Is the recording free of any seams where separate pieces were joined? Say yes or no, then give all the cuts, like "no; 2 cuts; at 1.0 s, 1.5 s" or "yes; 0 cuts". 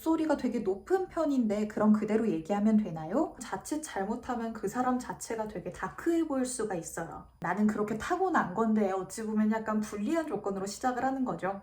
no; 2 cuts; at 3.5 s, 7.3 s